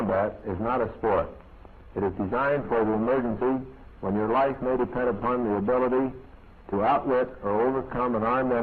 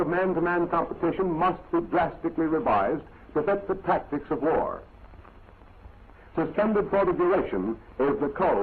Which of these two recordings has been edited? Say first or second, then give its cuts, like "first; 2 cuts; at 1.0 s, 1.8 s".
second; 1 cut; at 6.6 s